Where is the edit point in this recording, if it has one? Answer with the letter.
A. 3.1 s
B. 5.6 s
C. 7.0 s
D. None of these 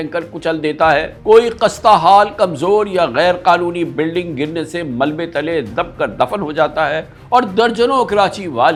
D